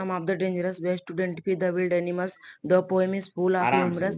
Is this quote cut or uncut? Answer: uncut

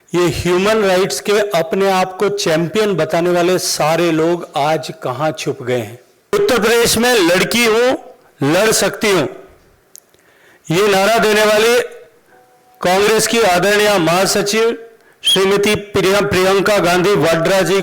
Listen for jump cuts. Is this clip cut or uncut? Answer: cut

